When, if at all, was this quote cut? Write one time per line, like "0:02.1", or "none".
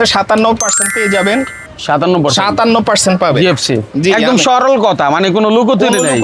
none

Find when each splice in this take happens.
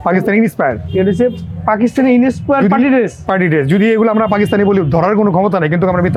none

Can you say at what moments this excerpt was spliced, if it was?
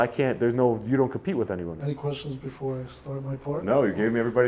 0:01.7

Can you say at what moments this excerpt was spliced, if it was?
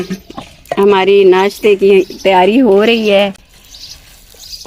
none

